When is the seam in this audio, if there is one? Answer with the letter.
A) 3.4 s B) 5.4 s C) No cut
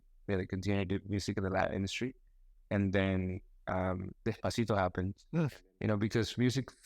B